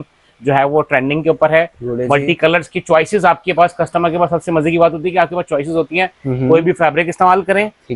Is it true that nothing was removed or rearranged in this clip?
yes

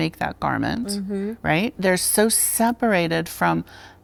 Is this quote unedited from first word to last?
yes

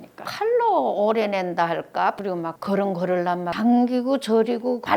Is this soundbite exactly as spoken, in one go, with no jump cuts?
no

